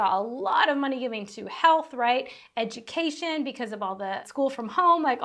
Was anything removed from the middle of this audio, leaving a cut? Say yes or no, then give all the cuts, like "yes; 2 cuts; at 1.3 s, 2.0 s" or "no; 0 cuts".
no; 0 cuts